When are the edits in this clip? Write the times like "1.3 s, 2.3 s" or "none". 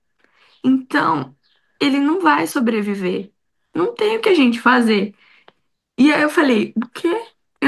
none